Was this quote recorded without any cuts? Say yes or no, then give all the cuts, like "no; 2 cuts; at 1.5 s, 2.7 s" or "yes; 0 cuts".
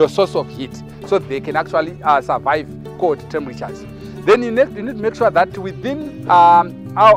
no; 1 cut; at 1.2 s